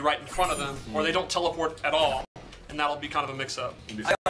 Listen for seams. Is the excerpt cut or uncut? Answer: cut